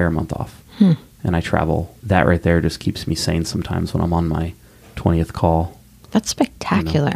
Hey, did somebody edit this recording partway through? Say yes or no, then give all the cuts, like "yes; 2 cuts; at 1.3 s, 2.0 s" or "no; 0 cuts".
yes; 1 cut; at 1.9 s